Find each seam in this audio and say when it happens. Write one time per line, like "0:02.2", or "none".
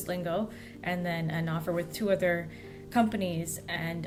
none